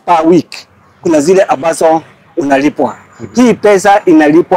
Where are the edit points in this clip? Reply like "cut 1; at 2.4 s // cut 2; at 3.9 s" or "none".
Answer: none